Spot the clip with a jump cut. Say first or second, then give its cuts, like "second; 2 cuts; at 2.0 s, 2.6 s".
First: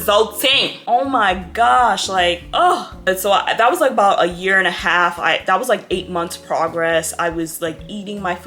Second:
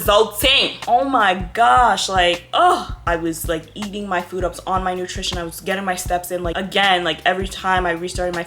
second; 2 cuts; at 3.0 s, 6.6 s